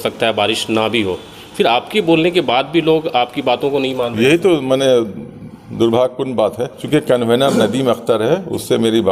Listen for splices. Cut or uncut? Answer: cut